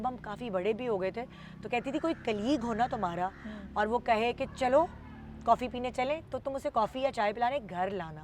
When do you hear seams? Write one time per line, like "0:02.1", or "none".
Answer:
none